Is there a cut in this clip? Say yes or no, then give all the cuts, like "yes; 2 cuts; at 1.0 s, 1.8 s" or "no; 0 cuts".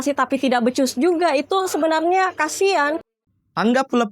yes; 1 cut; at 3.0 s